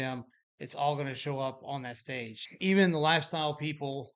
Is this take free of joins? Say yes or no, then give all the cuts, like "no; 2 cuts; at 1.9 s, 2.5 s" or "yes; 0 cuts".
no; 1 cut; at 2.4 s